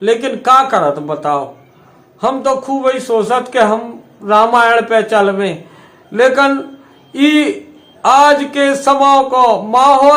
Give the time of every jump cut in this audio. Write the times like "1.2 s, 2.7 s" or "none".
none